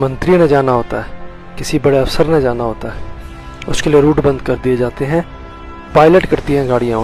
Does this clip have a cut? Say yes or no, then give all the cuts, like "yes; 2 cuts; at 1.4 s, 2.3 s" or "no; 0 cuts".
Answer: no; 0 cuts